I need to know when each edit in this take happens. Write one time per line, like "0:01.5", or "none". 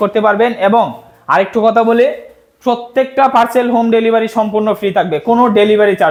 none